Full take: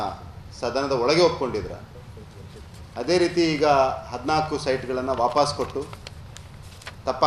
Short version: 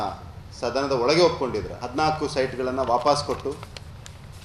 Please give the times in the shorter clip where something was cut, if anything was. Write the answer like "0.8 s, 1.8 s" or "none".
1.8 s